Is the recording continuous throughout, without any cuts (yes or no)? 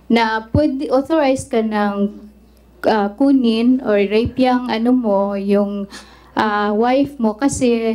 yes